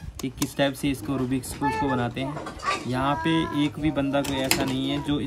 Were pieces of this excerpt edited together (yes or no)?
no